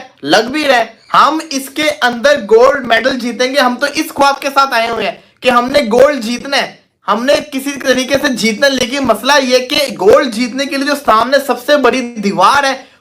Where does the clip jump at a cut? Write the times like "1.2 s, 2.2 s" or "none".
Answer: 1.0 s